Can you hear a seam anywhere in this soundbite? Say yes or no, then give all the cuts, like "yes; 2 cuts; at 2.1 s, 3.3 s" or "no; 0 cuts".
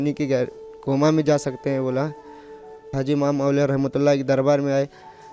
yes; 1 cut; at 2.7 s